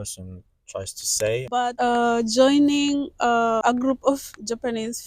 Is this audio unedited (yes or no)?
no